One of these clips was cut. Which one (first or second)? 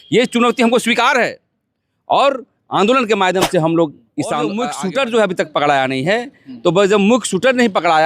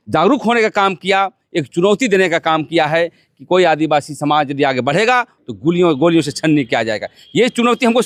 first